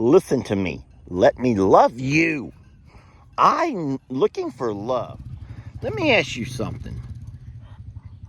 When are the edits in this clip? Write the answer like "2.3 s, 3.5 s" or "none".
5.2 s